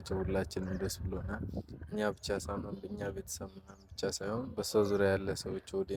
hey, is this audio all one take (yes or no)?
yes